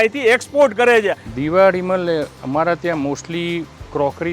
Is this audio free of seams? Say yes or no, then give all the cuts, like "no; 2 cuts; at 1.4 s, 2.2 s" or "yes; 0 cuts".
no; 1 cut; at 1.3 s